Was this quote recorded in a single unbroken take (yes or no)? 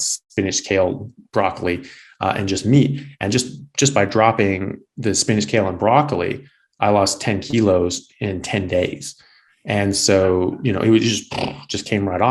yes